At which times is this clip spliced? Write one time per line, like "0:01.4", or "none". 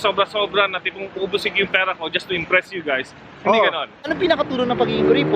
0:04.0

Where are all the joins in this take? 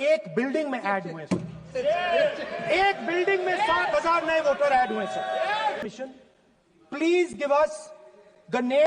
0:05.8

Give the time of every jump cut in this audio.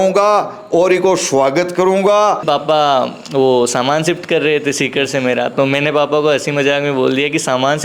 0:02.4

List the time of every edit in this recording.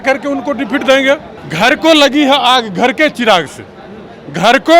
0:01.4

